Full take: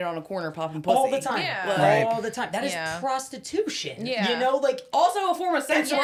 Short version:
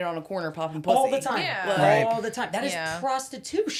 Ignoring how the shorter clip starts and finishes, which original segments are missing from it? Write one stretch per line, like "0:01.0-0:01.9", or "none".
none